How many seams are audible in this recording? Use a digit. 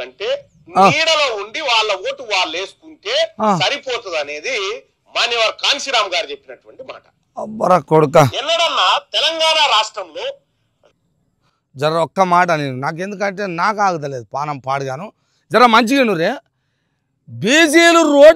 0